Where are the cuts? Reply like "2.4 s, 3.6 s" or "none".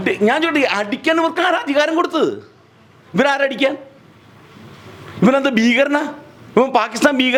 none